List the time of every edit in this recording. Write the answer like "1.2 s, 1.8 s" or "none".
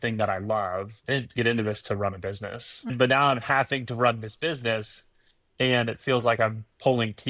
0.9 s, 2.9 s